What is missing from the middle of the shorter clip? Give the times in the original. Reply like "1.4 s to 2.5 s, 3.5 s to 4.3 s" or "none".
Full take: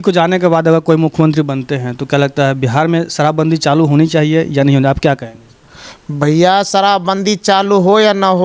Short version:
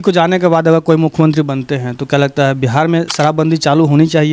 none